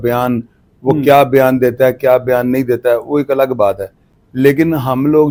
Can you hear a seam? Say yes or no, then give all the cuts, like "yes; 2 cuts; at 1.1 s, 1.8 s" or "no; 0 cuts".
no; 0 cuts